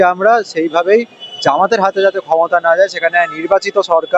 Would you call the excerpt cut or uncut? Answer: uncut